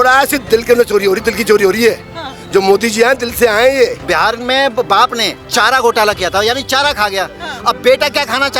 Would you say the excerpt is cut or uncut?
cut